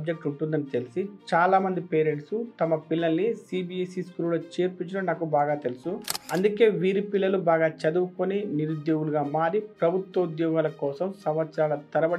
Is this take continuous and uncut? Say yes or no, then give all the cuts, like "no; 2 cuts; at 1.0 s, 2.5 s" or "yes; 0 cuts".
no; 1 cut; at 6.1 s